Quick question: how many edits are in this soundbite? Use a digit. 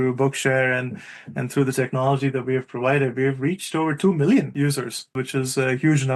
1